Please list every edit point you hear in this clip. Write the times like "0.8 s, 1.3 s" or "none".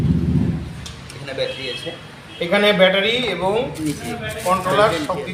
none